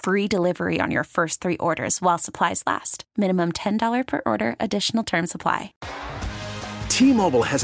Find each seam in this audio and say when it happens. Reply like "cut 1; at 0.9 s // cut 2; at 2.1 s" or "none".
cut 1; at 5.8 s